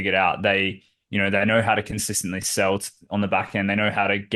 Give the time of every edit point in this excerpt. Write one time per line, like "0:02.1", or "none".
none